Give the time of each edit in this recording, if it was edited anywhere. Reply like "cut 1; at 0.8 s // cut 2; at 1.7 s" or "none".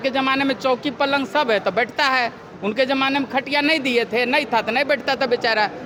none